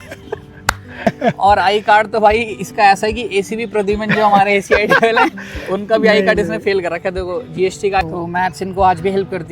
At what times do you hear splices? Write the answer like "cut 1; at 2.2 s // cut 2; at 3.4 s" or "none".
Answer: cut 1; at 1.1 s // cut 2; at 8.0 s

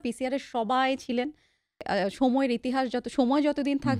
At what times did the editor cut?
cut 1; at 1.8 s

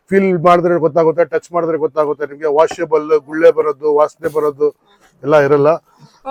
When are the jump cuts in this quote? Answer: none

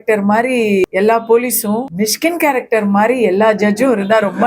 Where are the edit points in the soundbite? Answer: cut 1; at 0.8 s // cut 2; at 1.9 s

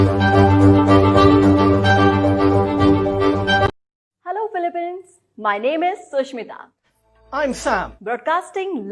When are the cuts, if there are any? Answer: cut 1; at 3.7 s

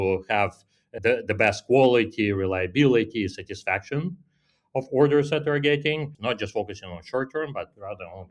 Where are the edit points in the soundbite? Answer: cut 1; at 0.9 s // cut 2; at 6.1 s

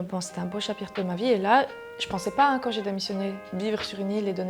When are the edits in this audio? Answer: cut 1; at 3.4 s

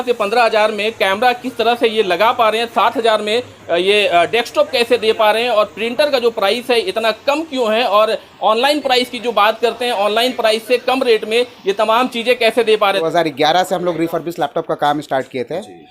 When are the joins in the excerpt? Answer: cut 1; at 13.0 s

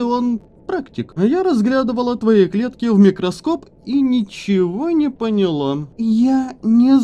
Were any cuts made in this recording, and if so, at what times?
cut 1; at 1.0 s // cut 2; at 5.9 s

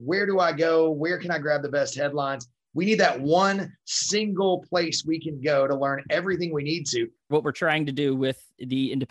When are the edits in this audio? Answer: cut 1; at 2.6 s // cut 2; at 7.3 s

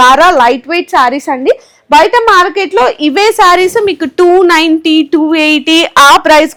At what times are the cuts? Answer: none

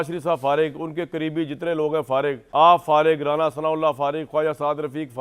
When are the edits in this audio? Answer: none

